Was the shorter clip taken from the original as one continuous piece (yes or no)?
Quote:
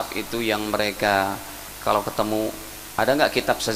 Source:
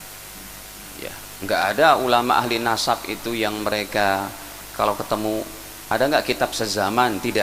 yes